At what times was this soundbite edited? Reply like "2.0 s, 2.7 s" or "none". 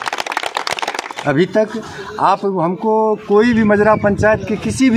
1.1 s